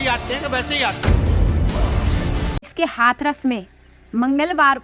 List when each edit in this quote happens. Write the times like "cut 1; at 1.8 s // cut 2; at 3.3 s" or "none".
cut 1; at 2.7 s